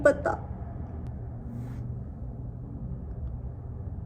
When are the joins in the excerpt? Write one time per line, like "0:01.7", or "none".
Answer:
none